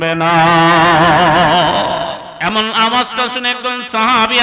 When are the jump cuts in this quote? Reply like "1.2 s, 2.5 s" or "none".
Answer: 2.3 s